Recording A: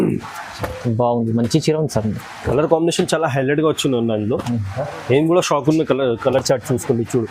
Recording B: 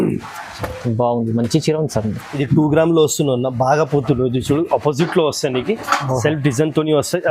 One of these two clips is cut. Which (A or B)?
B